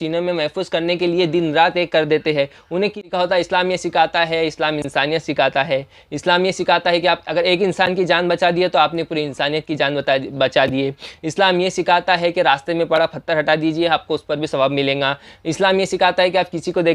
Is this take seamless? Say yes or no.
no